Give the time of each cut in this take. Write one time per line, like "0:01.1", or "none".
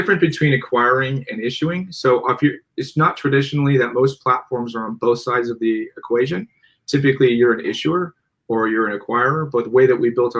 none

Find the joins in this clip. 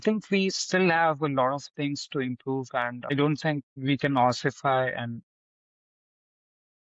0:03.1
0:03.7

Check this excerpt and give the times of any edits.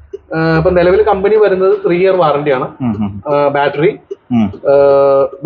none

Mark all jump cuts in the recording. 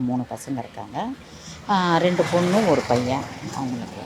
none

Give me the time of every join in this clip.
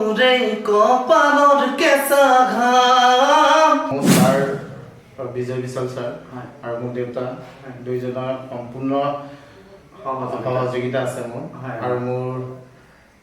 0:04.0

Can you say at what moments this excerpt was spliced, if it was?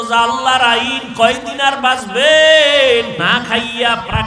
0:03.2

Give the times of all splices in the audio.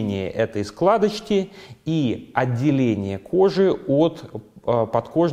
none

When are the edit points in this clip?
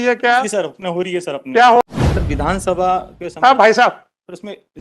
0:01.8

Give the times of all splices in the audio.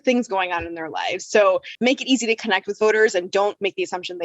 0:01.7

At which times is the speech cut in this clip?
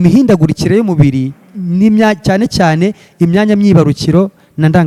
none

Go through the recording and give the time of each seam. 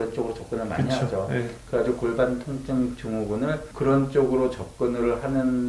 none

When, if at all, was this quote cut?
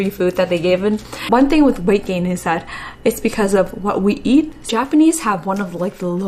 0:01.3
0:04.7

